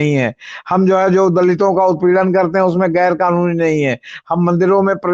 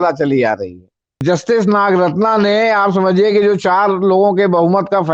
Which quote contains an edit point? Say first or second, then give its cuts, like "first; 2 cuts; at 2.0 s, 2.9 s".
second; 1 cut; at 1.2 s